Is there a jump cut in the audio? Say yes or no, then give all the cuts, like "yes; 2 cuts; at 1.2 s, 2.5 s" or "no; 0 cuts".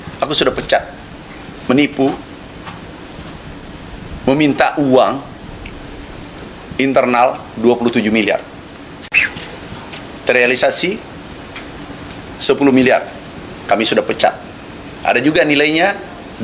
no; 0 cuts